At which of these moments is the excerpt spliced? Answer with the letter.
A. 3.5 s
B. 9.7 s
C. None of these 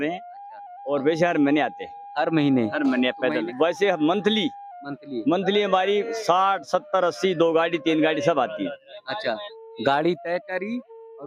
A